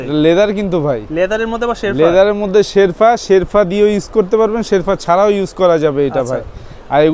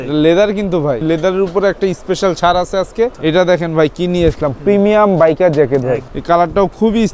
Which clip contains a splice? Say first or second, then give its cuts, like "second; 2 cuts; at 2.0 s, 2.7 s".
second; 3 cuts; at 1.0 s, 3.2 s, 6.1 s